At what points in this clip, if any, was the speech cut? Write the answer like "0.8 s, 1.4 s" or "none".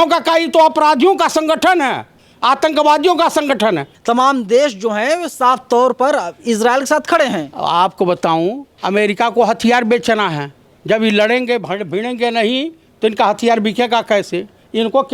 3.9 s